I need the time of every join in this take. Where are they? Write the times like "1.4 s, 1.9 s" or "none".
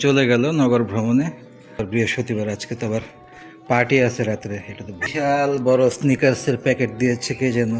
1.8 s, 5.0 s